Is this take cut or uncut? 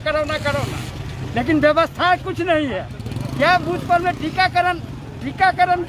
uncut